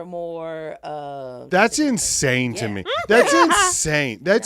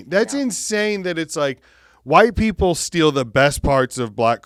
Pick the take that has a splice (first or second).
first